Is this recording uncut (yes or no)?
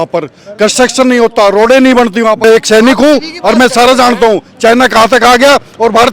no